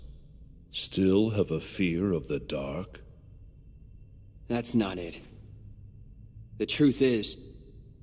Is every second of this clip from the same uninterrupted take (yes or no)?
yes